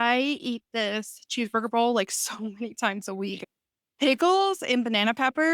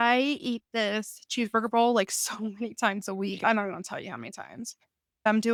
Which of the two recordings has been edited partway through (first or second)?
first